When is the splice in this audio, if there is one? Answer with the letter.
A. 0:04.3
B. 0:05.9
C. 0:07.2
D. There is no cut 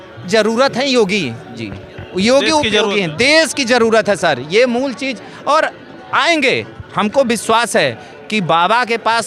D